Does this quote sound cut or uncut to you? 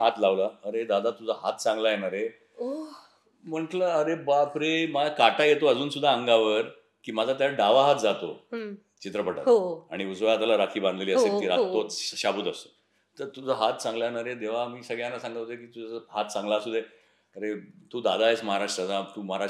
uncut